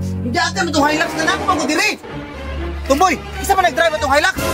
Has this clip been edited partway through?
no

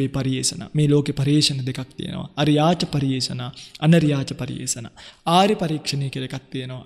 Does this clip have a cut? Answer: no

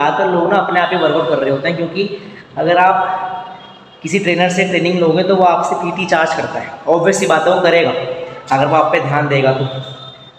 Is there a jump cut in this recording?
no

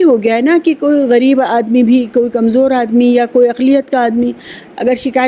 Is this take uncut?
yes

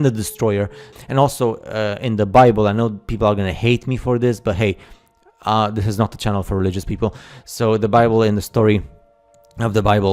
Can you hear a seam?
yes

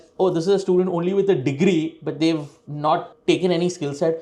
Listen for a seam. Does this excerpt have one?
no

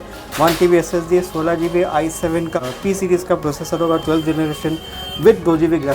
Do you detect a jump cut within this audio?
yes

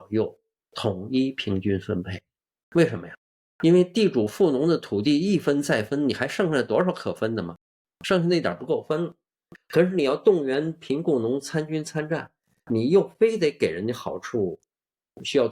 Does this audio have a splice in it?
yes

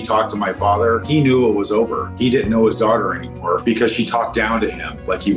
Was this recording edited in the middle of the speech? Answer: no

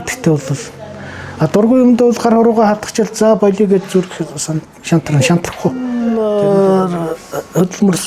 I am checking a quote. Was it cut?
yes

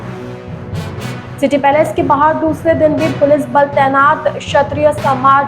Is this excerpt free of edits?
no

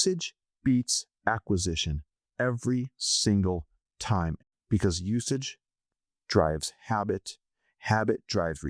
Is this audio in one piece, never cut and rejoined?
no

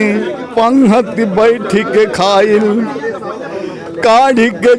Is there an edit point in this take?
no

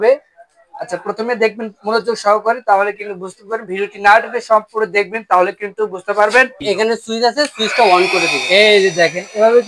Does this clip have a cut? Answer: yes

